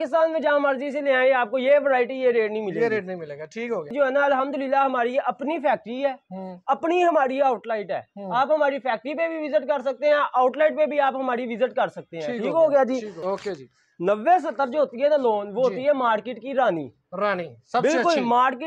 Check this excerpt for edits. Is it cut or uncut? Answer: cut